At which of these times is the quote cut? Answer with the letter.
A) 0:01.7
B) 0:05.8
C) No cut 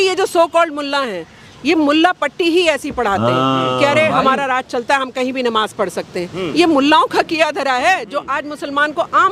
C